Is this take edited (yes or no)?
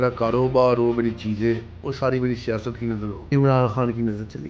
yes